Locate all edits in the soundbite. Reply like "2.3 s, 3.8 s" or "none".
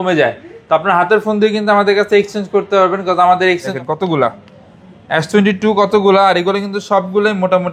3.7 s